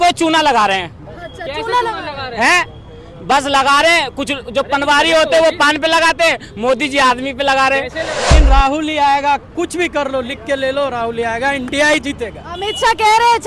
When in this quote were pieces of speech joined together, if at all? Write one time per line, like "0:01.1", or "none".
0:08.2